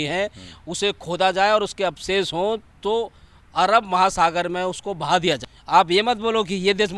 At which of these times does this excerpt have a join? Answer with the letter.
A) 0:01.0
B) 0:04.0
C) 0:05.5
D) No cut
C